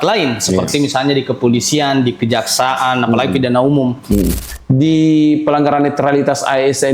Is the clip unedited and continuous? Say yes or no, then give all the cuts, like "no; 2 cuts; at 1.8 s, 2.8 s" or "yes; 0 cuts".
no; 1 cut; at 4.4 s